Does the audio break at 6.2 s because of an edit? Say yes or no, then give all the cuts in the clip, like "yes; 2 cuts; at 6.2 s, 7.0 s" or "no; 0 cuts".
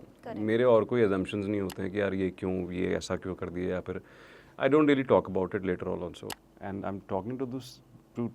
yes; 1 cut; at 6.2 s